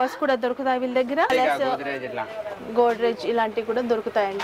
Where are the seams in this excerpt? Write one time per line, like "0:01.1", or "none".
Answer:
0:01.3